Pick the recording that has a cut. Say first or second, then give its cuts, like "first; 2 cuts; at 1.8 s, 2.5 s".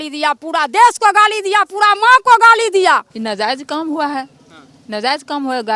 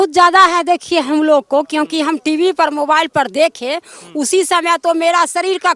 first; 1 cut; at 3.1 s